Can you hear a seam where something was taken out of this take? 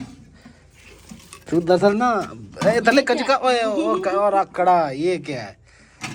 no; 0 cuts

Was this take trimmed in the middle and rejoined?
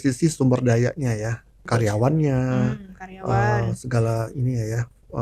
no; 0 cuts

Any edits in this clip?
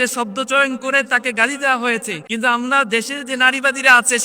yes; 1 cut; at 2.2 s

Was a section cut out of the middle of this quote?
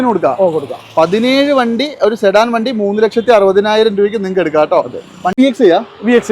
yes; 1 cut; at 5.4 s

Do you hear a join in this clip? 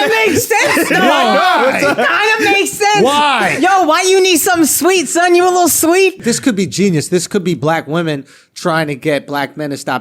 yes; 1 cut; at 6.2 s

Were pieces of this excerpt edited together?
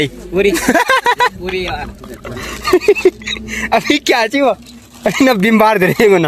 no; 0 cuts

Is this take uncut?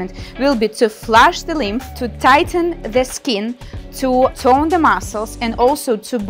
yes; 0 cuts

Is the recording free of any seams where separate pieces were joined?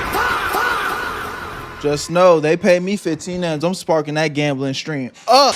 yes; 0 cuts

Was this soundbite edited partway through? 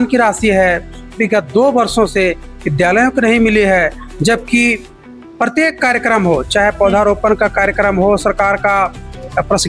no; 0 cuts

